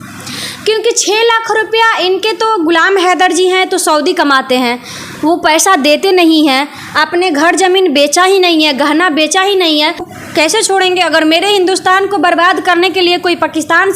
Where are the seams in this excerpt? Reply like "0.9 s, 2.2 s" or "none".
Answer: 10.1 s